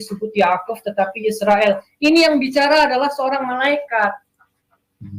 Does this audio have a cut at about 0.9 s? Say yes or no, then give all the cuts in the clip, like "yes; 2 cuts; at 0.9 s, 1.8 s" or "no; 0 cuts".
no; 0 cuts